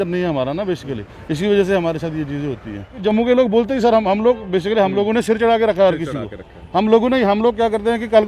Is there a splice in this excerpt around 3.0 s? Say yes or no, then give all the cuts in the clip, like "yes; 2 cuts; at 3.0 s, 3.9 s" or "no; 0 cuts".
yes; 1 cut; at 3.0 s